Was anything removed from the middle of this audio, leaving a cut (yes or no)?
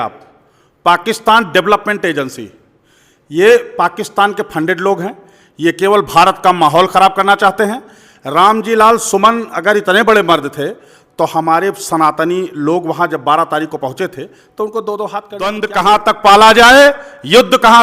yes